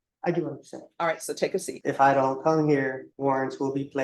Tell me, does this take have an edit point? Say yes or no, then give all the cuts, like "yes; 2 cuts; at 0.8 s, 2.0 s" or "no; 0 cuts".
yes; 2 cuts; at 1.7 s, 3.1 s